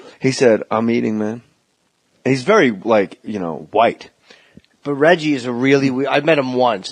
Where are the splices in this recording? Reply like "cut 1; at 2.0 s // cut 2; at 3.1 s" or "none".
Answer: cut 1; at 1.3 s